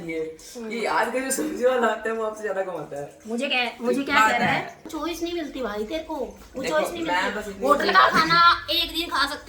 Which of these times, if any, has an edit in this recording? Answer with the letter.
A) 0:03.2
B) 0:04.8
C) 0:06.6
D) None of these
B